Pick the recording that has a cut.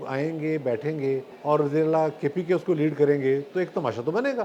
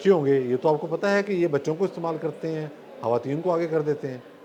first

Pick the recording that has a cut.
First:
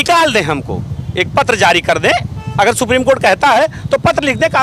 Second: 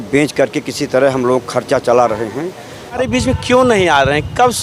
second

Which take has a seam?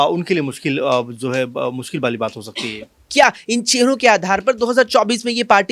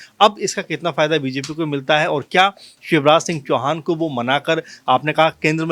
first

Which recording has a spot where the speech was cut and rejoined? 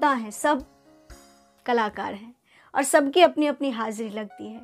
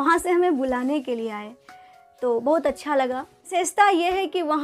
second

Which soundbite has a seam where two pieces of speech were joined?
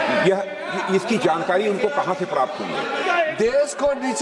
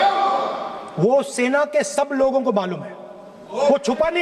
first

